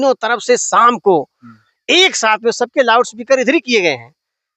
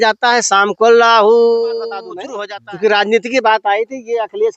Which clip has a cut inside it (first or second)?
second